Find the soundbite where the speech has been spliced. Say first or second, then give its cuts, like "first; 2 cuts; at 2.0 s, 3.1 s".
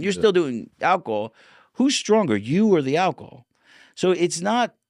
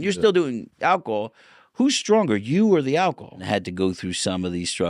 second; 1 cut; at 3.4 s